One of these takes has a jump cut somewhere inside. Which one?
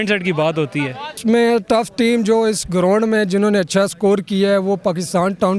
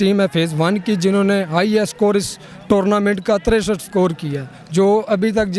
first; 1 cut; at 1.2 s

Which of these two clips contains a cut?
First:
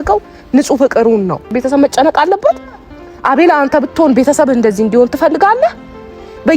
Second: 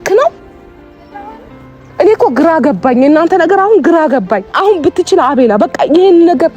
first; 1 cut; at 1.5 s

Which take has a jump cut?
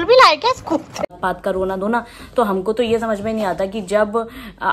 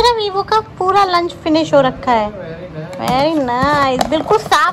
first; 1 cut; at 1.1 s

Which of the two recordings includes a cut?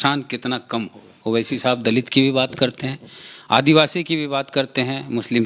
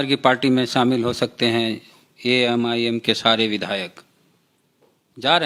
first; 1 cut; at 1.1 s

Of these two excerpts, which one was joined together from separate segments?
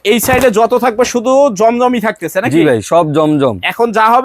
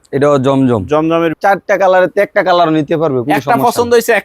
second; 1 cut; at 1.3 s

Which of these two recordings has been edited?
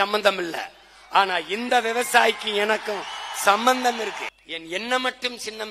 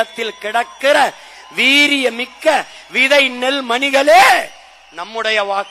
first; 1 cut; at 4.3 s

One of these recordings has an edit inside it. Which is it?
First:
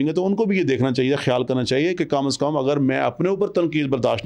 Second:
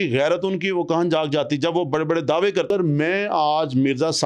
second; 1 cut; at 2.7 s

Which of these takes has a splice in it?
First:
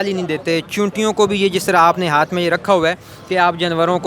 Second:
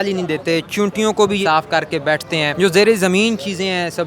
second; 2 cuts; at 1.4 s, 2.5 s

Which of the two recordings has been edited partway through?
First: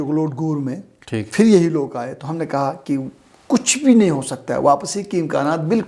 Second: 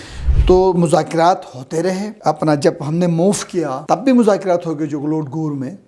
second; 2 cuts; at 2.1 s, 3.8 s

